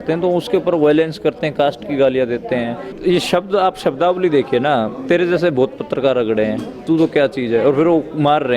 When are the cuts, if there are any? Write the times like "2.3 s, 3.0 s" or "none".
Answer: 3.0 s